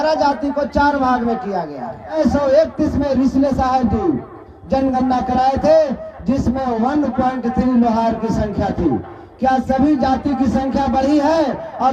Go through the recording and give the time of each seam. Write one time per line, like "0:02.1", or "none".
0:02.1